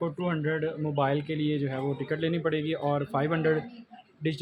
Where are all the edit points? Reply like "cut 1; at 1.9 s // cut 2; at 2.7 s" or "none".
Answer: none